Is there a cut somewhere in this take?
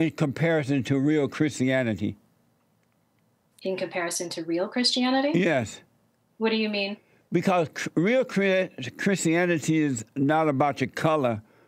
no; 0 cuts

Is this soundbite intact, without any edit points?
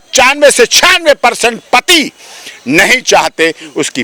yes; 0 cuts

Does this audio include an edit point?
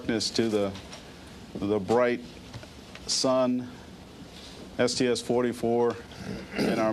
no; 0 cuts

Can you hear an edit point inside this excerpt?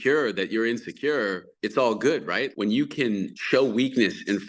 yes; 3 cuts; at 1.5 s, 2.5 s, 3.4 s

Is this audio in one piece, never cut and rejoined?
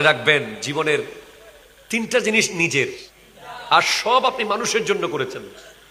yes; 0 cuts

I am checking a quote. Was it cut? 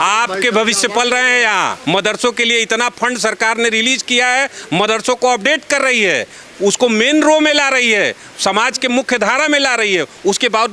yes; 1 cut; at 1.8 s

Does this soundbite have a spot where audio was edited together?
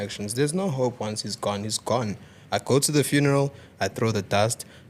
no; 0 cuts

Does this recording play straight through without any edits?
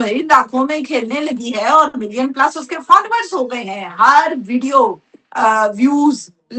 yes; 0 cuts

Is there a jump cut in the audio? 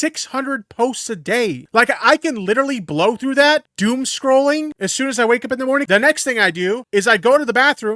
yes; 5 cuts; at 1.6 s, 3.7 s, 4.8 s, 5.9 s, 6.8 s

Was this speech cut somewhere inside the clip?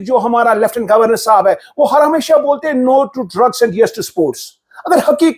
no; 0 cuts

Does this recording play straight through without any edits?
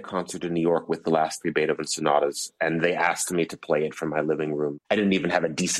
no; 1 cut; at 4.8 s

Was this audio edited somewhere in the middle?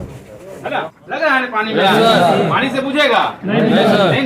yes; 1 cut; at 1.0 s

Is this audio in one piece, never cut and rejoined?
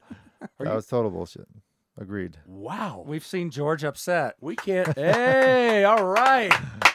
yes; 0 cuts

